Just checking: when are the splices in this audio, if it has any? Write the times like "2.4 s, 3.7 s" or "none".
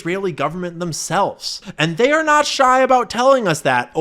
1.6 s

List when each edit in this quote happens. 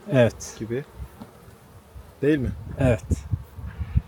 none

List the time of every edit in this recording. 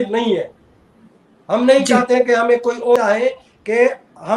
3.0 s

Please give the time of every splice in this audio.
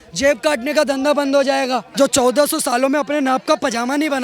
1.9 s

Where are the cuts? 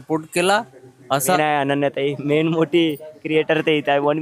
1.4 s

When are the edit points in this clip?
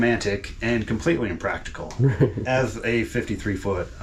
none

